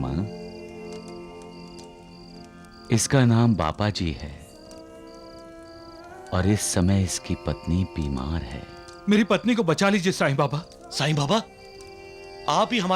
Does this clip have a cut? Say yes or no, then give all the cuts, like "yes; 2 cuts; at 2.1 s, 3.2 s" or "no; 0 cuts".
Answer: no; 0 cuts